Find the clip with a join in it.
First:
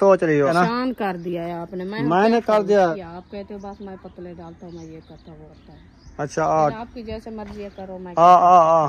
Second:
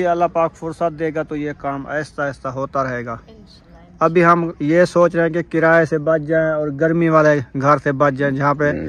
first; 3 cuts; at 0.8 s, 2.9 s, 5.5 s

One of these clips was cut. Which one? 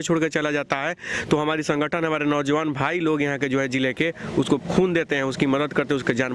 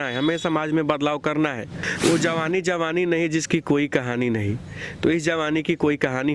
second; 1 cut; at 1.8 s

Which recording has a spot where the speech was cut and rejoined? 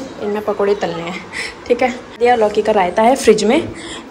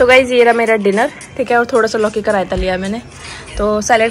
first; 1 cut; at 2.2 s

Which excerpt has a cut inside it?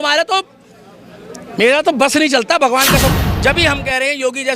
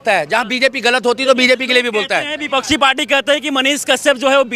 first; 1 cut; at 3.2 s

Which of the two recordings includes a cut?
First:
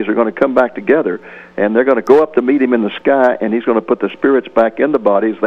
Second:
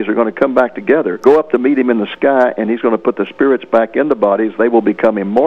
second; 1 cut; at 1.2 s

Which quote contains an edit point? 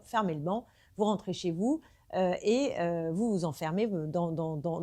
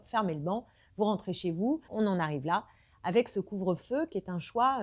second; 1 cut; at 1.9 s

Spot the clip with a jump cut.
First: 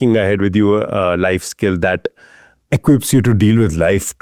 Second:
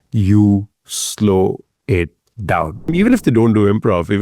second; 1 cut; at 2.9 s

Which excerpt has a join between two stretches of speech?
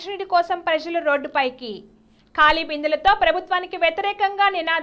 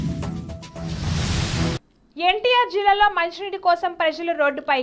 second; 1 cut; at 1.8 s

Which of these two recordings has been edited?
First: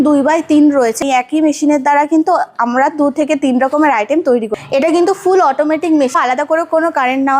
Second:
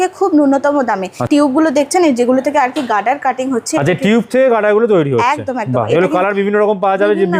first; 3 cuts; at 1.0 s, 4.5 s, 6.1 s

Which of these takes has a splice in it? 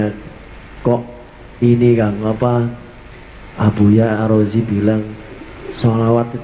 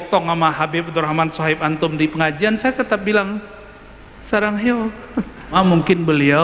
second; 1 cut; at 5.5 s

